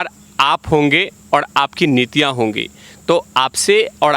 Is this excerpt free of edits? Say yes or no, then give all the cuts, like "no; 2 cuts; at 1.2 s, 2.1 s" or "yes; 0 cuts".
yes; 0 cuts